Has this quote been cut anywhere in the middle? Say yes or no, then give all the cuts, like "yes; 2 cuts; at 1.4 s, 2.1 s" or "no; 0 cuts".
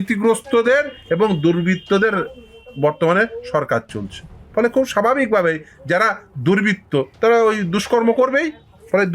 no; 0 cuts